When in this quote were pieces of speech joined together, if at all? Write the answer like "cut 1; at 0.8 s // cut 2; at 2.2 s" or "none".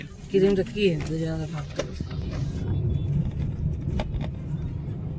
cut 1; at 2.3 s